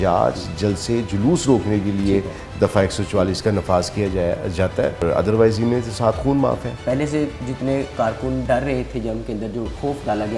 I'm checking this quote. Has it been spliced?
yes; 3 cuts; at 5.0 s, 6.7 s, 8.4 s

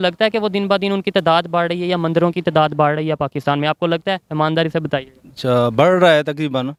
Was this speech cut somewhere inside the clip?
no; 0 cuts

